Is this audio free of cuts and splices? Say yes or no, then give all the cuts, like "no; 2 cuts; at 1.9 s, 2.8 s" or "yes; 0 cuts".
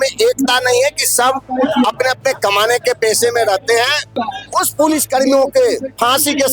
no; 1 cut; at 4.1 s